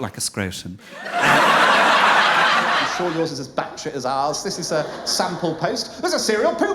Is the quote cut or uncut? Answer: cut